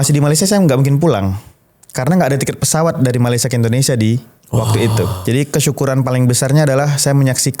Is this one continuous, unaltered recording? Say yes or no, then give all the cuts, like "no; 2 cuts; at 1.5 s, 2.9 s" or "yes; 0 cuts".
no; 1 cut; at 5.2 s